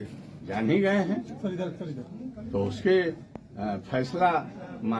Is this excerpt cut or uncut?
uncut